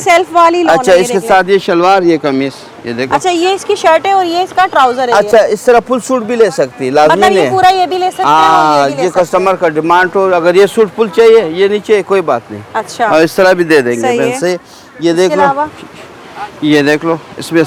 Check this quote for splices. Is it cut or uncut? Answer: uncut